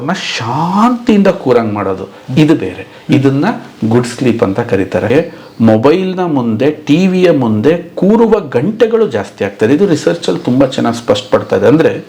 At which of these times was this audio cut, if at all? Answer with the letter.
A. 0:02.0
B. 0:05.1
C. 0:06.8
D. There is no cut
B